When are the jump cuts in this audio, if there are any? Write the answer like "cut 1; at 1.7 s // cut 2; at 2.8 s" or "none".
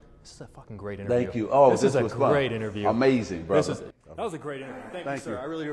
cut 1; at 3.9 s